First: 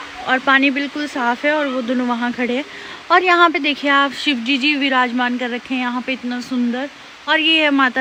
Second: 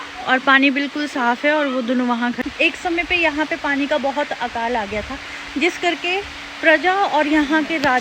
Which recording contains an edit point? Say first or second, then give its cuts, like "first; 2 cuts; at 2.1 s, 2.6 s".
second; 1 cut; at 2.4 s